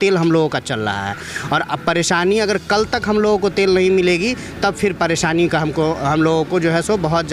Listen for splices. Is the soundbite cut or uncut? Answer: uncut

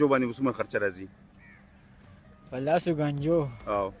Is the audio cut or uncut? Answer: uncut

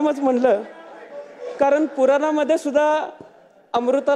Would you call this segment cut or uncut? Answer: uncut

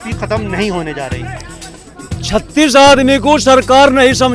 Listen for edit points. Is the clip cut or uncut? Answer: uncut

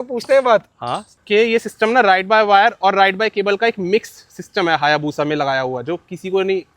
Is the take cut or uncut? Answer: cut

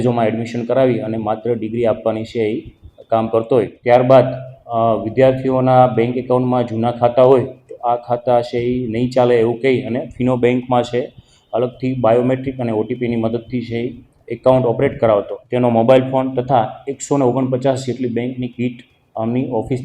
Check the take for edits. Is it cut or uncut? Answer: cut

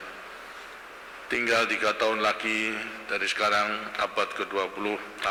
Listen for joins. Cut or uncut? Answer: uncut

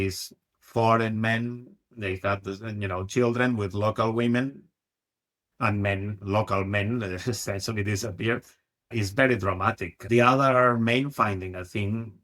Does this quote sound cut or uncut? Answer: cut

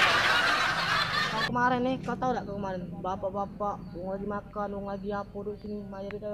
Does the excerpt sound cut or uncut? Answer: cut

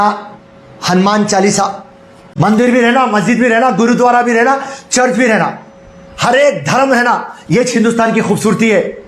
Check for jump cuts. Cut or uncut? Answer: cut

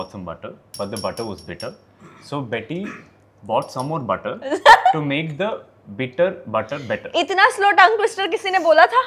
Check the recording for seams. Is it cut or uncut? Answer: uncut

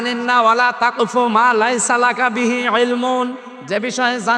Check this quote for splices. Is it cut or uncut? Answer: uncut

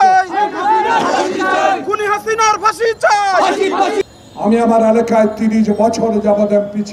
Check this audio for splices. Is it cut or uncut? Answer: cut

